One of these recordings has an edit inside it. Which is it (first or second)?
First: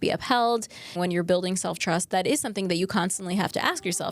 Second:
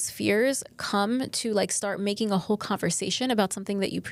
first